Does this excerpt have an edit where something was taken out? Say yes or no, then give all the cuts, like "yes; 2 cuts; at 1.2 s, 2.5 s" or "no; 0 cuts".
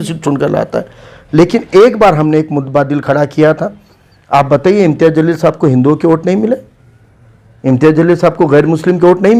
no; 0 cuts